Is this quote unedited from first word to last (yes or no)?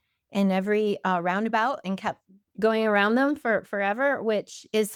yes